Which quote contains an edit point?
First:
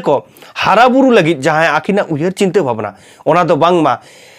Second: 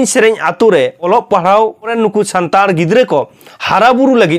second; 2 cuts; at 1.1 s, 1.9 s

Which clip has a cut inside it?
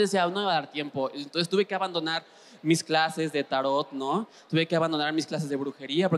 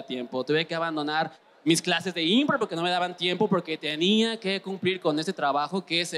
second; 1 cut; at 1.6 s

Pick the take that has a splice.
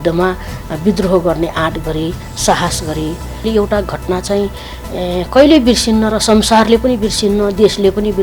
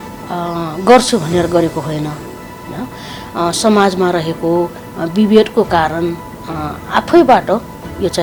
first; 1 cut; at 3.5 s

